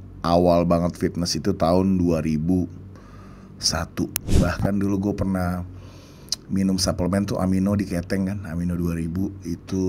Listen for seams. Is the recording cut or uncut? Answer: cut